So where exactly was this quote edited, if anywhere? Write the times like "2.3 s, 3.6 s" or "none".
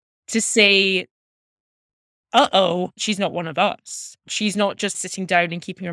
3.0 s, 5.0 s